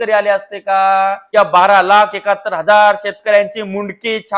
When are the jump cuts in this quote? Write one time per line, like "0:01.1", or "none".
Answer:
0:01.2